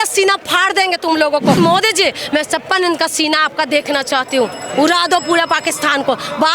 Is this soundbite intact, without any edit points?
no; 1 cut; at 1.6 s

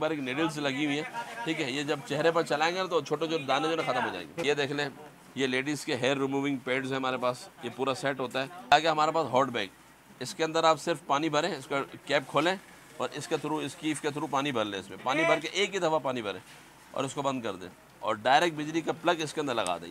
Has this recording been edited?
yes; 2 cuts; at 4.4 s, 8.7 s

